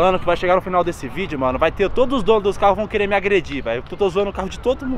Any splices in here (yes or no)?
no